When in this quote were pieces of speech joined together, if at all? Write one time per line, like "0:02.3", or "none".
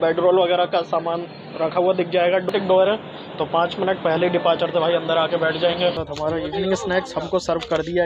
0:02.5
0:06.1